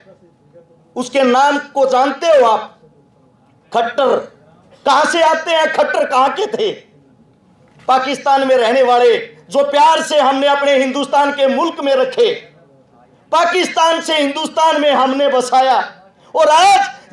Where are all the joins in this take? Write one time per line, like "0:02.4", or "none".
none